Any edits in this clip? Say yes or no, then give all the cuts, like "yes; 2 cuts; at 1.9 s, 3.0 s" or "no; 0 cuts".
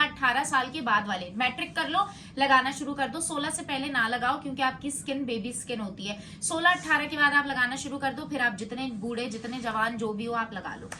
no; 0 cuts